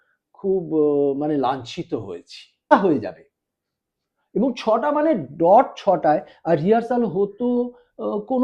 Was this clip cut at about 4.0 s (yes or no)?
no